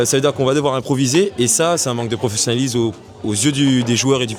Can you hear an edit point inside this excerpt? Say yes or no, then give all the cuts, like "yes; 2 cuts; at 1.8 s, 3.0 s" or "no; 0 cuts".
no; 0 cuts